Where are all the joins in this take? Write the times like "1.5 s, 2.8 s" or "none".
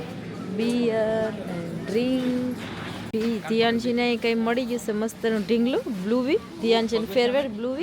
3.0 s